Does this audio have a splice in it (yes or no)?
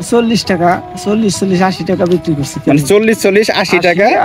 no